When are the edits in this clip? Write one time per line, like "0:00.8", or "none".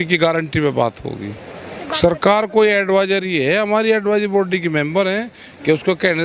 0:01.8